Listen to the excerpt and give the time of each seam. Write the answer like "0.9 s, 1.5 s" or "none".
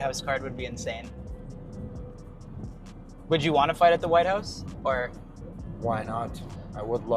none